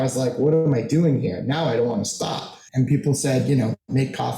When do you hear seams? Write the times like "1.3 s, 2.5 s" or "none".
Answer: 2.6 s